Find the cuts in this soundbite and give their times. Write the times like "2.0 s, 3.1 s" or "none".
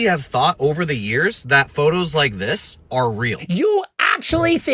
3.4 s